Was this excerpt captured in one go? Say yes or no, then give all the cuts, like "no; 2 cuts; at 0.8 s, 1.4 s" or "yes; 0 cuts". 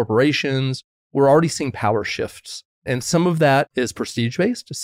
no; 3 cuts; at 1.1 s, 2.7 s, 3.7 s